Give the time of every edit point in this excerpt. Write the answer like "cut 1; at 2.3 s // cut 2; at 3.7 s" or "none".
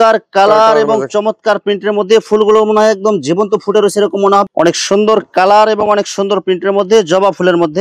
cut 1; at 4.4 s